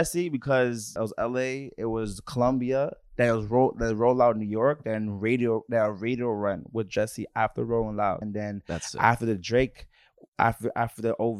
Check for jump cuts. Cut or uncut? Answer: cut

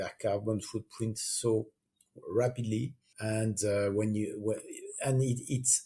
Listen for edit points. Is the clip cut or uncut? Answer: uncut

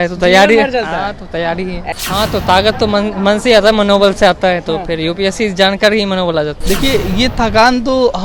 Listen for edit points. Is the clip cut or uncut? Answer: cut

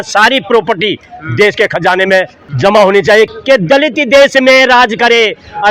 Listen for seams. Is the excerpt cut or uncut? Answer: cut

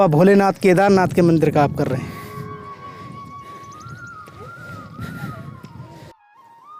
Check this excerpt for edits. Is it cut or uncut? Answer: uncut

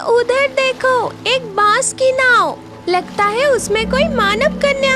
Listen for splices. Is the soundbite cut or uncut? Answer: uncut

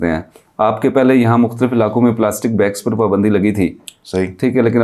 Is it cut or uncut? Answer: uncut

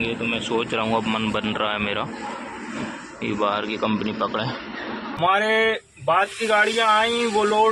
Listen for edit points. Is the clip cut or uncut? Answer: cut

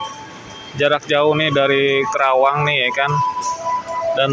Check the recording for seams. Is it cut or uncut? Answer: uncut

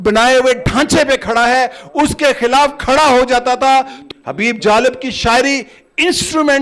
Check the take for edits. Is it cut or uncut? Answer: cut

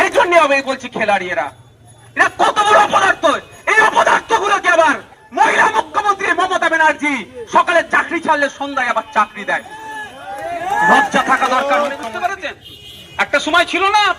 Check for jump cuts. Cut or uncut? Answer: cut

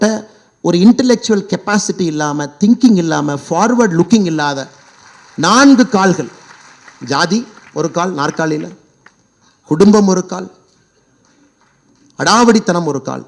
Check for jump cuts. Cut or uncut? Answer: uncut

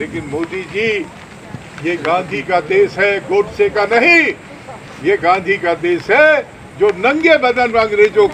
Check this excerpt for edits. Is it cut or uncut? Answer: uncut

